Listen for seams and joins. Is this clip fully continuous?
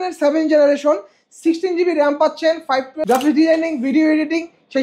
no; 1 cut; at 2.9 s

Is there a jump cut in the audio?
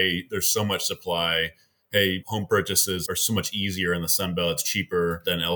no; 0 cuts

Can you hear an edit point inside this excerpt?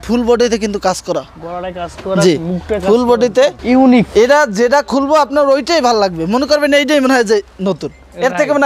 yes; 1 cut; at 3.6 s

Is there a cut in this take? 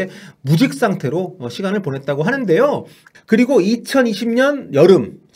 yes; 1 cut; at 3.0 s

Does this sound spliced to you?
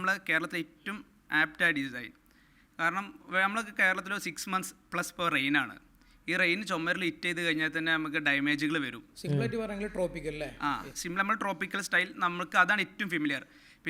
no; 0 cuts

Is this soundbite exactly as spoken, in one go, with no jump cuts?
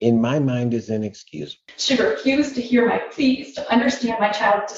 no; 1 cut; at 1.6 s

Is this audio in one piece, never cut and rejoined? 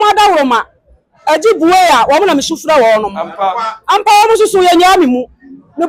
yes; 0 cuts

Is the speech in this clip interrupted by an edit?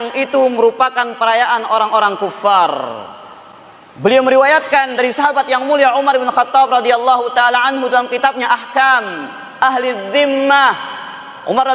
no; 0 cuts

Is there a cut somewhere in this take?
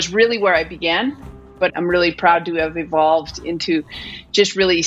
yes; 1 cut; at 1.6 s

